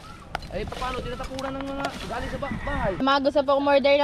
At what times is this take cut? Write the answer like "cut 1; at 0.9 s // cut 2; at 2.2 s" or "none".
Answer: cut 1; at 3.0 s